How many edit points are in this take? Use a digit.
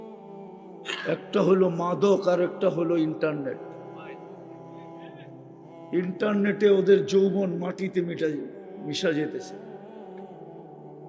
3